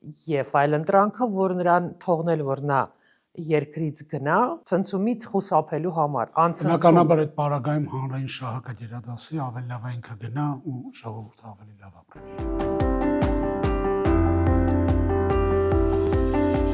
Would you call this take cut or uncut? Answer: cut